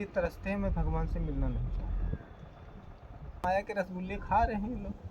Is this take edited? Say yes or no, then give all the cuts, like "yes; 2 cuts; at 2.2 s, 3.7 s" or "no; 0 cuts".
yes; 1 cut; at 3.4 s